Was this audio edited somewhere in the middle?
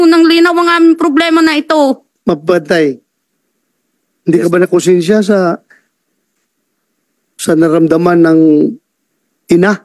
yes; 1 cut; at 2.1 s

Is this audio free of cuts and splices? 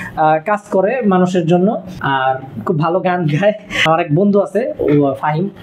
no; 2 cuts; at 1.9 s, 3.7 s

